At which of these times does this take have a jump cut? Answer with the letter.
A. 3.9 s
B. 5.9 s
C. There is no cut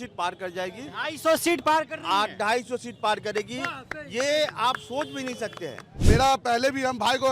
B